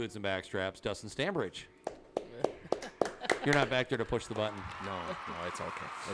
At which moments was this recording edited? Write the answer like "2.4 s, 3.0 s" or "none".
none

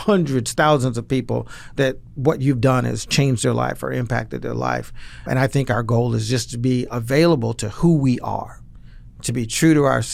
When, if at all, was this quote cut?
5.2 s

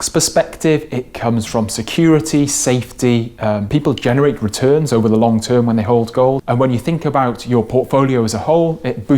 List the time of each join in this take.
3.6 s, 6.4 s

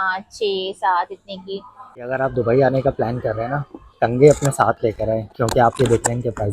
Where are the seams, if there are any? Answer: 2.0 s

